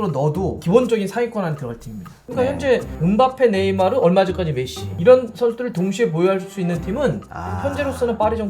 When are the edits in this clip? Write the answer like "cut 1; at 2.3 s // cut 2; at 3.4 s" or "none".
cut 1; at 2.1 s // cut 2; at 4.9 s